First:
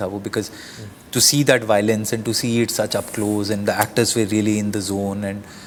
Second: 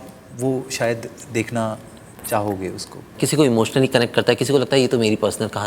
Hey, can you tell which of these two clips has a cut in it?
second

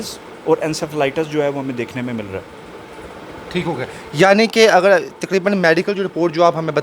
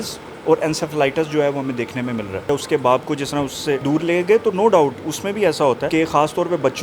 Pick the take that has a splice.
second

